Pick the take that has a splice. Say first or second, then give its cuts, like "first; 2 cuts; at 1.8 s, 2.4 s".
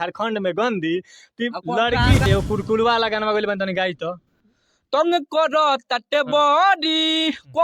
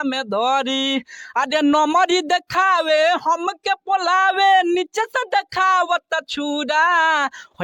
first; 1 cut; at 2.3 s